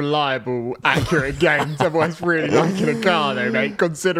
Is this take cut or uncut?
uncut